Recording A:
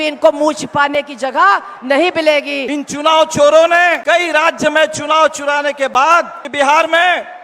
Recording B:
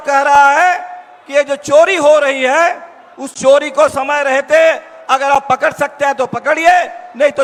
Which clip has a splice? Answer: A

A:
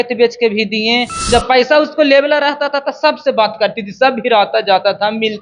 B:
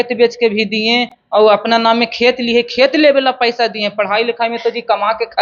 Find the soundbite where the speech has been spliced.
A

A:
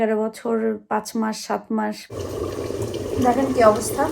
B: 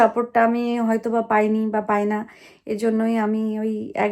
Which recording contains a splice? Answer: A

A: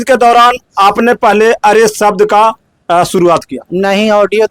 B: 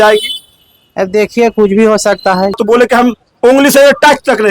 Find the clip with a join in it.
B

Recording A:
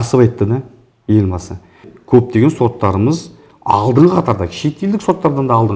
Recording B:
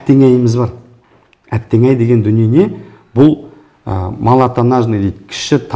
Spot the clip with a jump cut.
A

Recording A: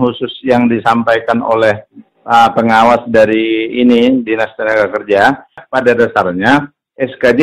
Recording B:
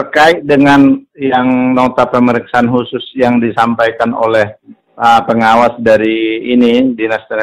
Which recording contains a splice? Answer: A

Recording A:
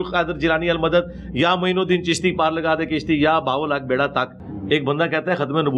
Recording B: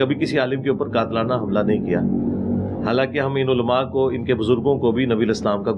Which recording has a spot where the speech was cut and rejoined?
A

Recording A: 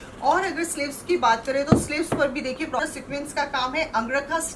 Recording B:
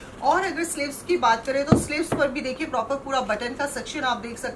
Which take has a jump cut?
A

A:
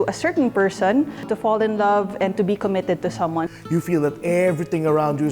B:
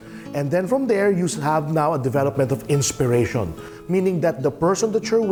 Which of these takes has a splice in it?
A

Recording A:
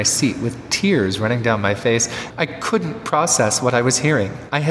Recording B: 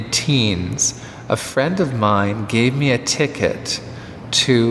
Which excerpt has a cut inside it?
A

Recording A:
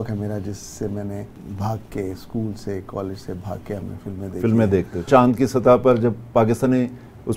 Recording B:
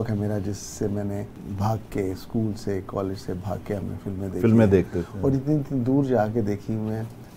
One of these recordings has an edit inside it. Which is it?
A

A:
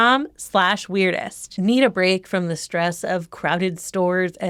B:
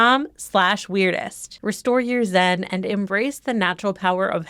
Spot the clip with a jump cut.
B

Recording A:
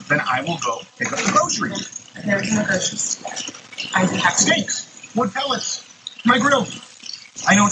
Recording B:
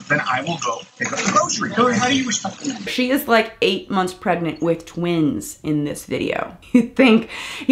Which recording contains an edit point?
B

